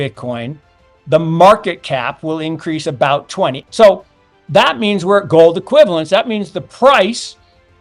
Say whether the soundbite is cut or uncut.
cut